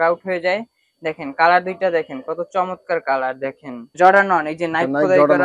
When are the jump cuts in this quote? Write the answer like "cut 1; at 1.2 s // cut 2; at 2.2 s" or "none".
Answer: cut 1; at 4.0 s